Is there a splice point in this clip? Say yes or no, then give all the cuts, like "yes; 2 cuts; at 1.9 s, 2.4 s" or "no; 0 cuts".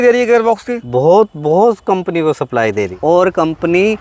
yes; 1 cut; at 2.9 s